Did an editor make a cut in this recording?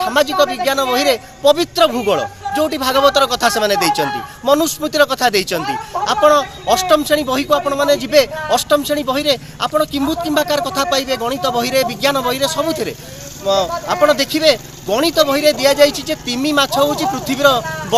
no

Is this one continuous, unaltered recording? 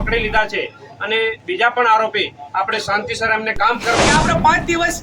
no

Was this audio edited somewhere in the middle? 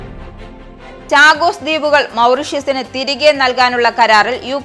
yes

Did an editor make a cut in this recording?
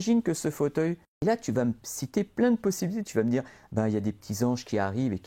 yes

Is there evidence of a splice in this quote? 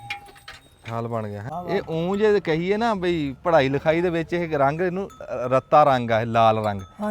yes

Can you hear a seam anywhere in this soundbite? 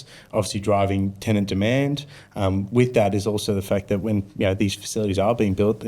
no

